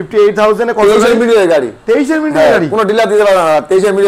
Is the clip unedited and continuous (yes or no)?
yes